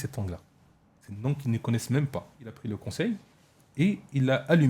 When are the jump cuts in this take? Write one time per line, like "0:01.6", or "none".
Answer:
0:02.6